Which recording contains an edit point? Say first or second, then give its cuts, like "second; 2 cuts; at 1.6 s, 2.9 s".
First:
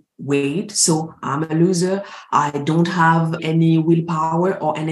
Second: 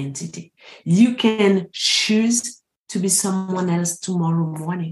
first; 1 cut; at 3.4 s